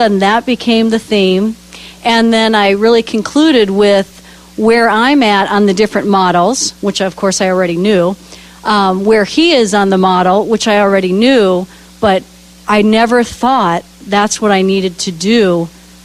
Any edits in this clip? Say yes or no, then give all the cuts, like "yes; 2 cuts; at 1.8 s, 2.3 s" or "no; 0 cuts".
yes; 1 cut; at 10.6 s